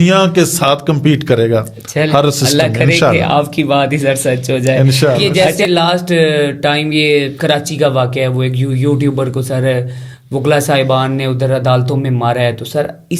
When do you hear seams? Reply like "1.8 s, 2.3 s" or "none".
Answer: 5.3 s